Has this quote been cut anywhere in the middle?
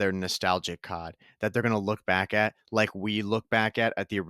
no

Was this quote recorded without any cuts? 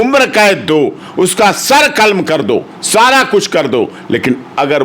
yes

